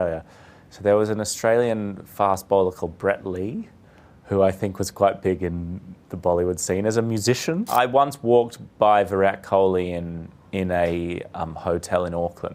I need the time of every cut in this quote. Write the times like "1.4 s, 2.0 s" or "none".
7.6 s